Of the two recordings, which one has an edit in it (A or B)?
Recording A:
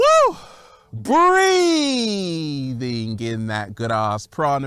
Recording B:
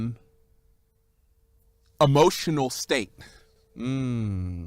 B